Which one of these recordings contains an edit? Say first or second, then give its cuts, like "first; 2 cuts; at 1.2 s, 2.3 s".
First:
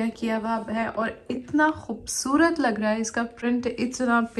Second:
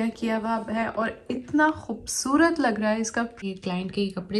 second; 1 cut; at 3.4 s